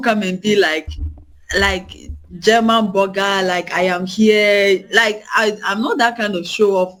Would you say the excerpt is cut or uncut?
uncut